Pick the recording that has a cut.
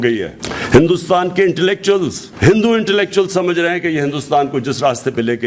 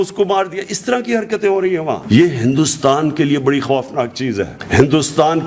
second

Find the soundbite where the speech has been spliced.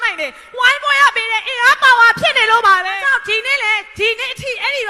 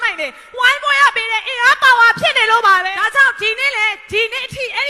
first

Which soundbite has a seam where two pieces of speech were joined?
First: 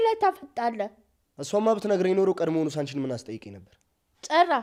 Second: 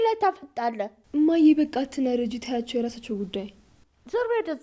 second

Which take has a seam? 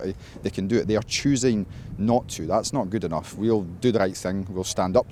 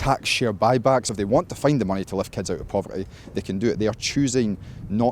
second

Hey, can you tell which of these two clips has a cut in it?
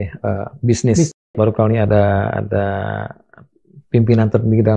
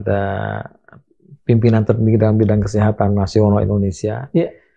first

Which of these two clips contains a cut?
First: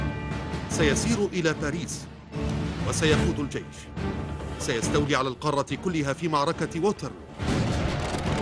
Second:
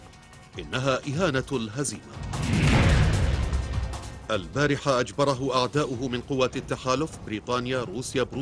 second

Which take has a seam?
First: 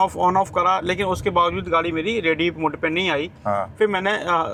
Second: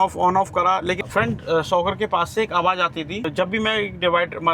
second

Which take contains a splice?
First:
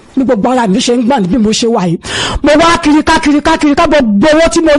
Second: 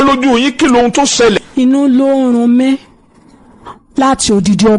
second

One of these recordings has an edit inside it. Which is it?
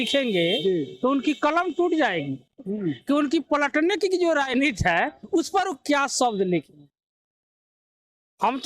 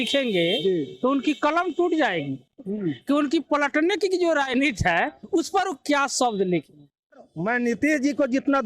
second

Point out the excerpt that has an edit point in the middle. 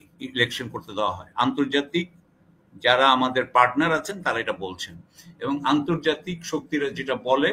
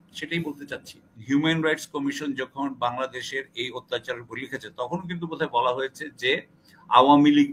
second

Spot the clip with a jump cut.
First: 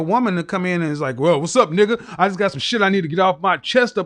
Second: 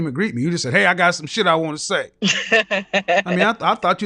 second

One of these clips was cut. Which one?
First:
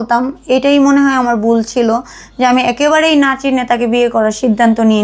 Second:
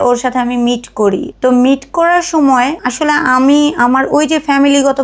second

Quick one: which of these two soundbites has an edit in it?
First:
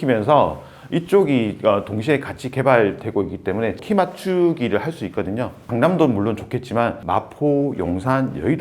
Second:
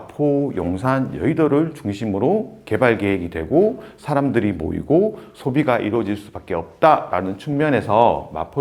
first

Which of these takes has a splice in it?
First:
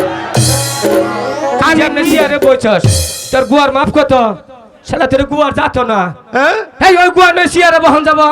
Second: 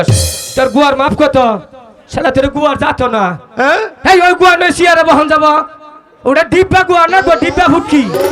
first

